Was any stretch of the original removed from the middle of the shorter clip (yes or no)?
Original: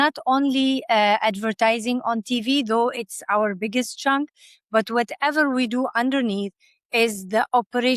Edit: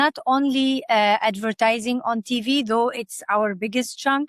no